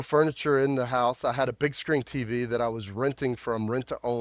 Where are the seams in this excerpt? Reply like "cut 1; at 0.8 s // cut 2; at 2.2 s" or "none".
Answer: none